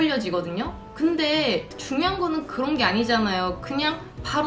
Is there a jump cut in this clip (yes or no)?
no